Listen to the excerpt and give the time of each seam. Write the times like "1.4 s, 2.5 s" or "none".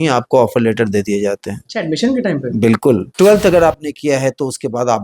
3.1 s